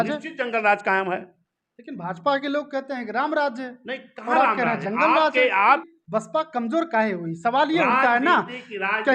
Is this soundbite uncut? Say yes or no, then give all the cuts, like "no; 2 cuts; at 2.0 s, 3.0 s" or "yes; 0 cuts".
no; 1 cut; at 5.9 s